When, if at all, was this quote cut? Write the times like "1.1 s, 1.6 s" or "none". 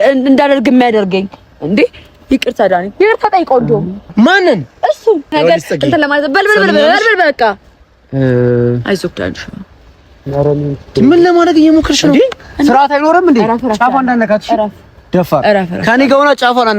5.4 s